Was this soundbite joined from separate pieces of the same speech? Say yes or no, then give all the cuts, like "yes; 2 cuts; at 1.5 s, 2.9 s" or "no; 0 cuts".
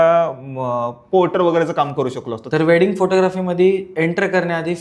yes; 1 cut; at 2.3 s